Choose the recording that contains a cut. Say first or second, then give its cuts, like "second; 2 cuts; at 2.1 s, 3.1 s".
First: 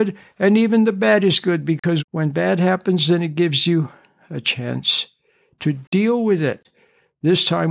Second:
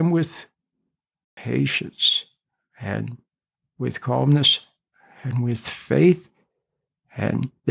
first; 1 cut; at 2.0 s